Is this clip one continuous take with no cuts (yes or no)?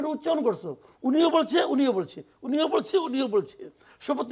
yes